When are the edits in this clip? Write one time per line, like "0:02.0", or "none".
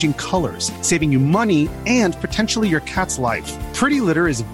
none